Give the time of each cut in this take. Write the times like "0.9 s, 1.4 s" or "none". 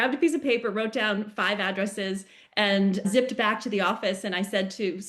3.0 s